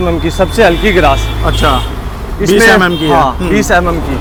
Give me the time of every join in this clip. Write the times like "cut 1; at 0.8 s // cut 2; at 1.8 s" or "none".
none

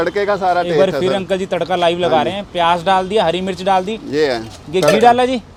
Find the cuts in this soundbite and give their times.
none

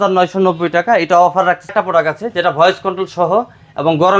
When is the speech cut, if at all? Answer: cut 1; at 1.7 s

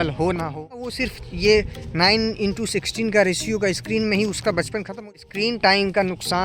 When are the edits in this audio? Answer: cut 1; at 0.9 s // cut 2; at 5.1 s

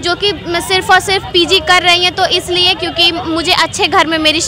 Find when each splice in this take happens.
none

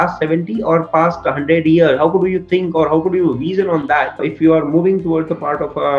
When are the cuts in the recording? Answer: cut 1; at 4.2 s

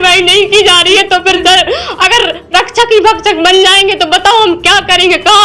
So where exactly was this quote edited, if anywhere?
none

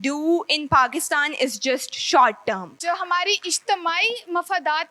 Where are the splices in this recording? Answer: cut 1; at 2.7 s

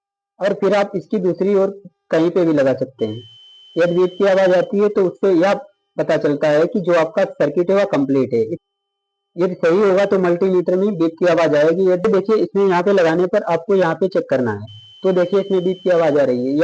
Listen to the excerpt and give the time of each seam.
cut 1; at 8.6 s // cut 2; at 12.0 s

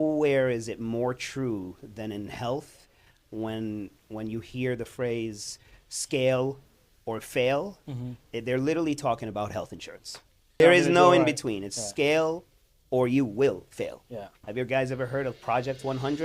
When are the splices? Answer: cut 1; at 10.6 s // cut 2; at 14.4 s

